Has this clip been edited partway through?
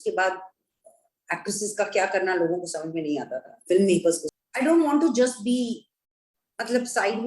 yes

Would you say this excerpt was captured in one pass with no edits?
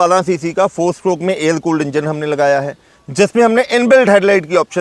yes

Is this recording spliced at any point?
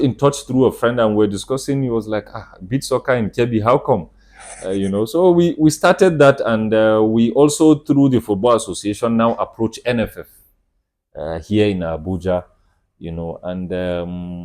no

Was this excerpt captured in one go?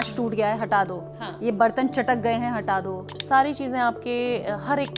no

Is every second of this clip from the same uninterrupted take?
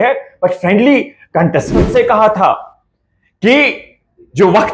no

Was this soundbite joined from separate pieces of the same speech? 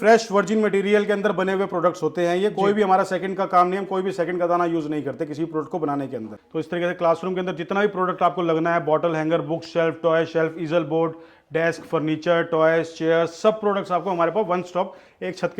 yes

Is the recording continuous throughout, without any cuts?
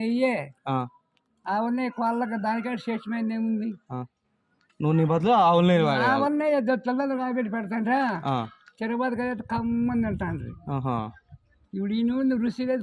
yes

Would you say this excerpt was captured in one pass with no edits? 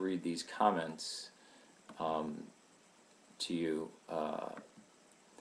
yes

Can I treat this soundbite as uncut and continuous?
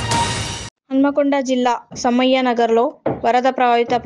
yes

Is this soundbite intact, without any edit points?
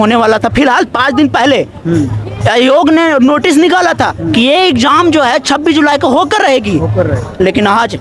yes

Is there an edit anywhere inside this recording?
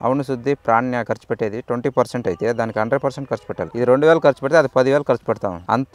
no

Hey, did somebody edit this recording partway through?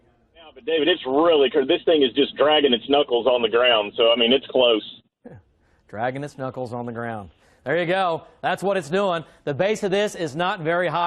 yes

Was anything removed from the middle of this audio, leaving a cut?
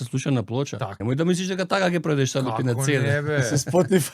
yes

